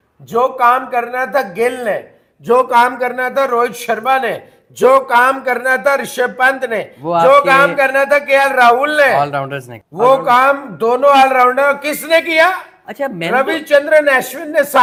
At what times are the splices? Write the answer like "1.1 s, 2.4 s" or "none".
none